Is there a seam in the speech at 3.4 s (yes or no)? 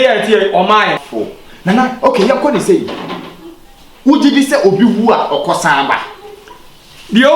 no